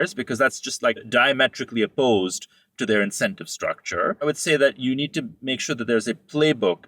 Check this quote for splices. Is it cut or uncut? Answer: cut